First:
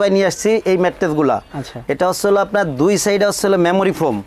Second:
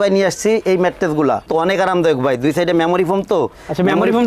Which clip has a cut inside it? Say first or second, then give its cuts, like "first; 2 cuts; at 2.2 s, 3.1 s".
second; 1 cut; at 1.5 s